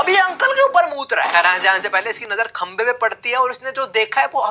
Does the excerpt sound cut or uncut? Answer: uncut